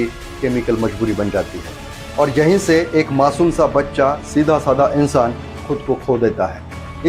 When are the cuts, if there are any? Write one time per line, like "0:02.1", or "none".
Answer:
none